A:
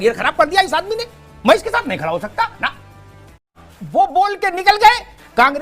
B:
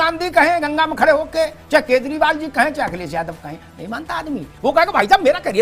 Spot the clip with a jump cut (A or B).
A